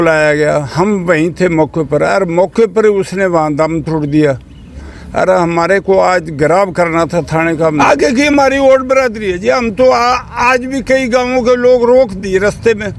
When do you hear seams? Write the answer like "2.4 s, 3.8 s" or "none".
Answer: 7.8 s